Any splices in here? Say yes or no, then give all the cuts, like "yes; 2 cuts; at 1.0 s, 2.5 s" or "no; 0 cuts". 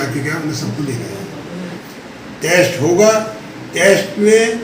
yes; 1 cut; at 1.8 s